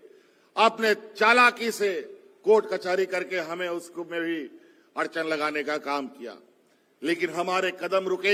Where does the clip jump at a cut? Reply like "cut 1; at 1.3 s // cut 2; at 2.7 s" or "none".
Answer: none